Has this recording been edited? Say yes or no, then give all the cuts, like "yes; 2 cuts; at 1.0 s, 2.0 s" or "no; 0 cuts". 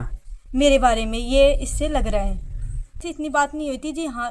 yes; 1 cut; at 3.0 s